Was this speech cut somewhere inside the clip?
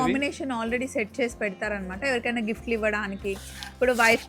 no; 0 cuts

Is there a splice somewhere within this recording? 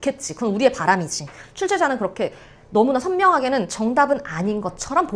no; 0 cuts

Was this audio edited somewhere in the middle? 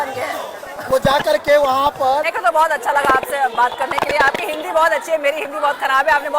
yes; 1 cut; at 2.3 s

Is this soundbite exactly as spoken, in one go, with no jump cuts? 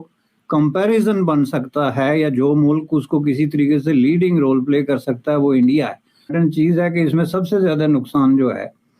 no; 1 cut; at 6.3 s

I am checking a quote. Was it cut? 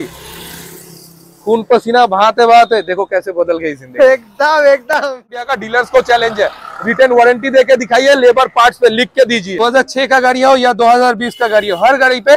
yes; 2 cuts; at 5.5 s, 9.6 s

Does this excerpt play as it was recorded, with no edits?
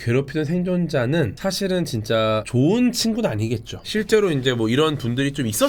yes; 0 cuts

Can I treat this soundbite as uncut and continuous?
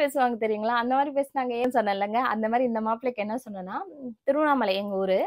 no; 1 cut; at 1.7 s

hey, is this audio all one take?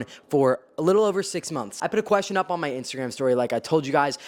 no; 1 cut; at 1.7 s

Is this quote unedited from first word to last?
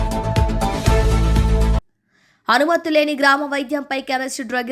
yes; 0 cuts

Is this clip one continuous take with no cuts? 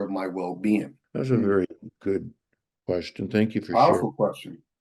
no; 1 cut; at 1.0 s

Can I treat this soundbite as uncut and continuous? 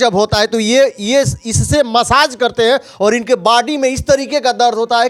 yes; 0 cuts

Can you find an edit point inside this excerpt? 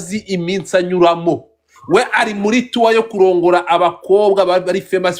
no; 0 cuts

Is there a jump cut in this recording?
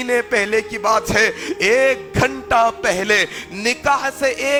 no; 0 cuts

